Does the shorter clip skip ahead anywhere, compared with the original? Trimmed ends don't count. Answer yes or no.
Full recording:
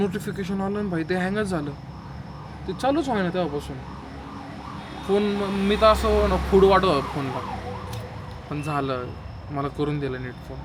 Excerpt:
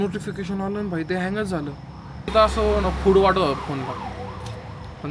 yes